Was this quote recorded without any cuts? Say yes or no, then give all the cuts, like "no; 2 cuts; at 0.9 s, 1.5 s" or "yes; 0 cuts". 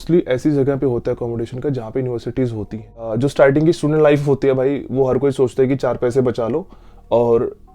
no; 1 cut; at 3.0 s